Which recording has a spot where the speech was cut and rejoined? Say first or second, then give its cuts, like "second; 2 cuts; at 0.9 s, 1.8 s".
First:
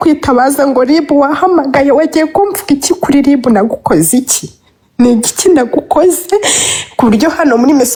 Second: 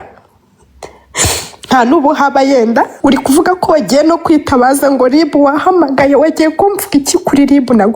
second; 1 cut; at 2.9 s